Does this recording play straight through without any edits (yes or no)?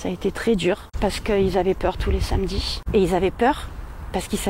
no